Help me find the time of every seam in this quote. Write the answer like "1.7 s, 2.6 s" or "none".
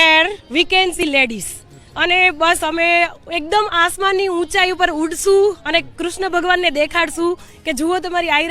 1.0 s